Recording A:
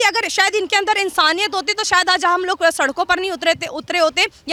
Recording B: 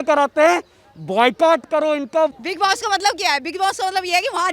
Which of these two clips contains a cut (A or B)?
B